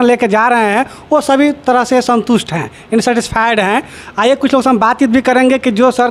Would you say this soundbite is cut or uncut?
uncut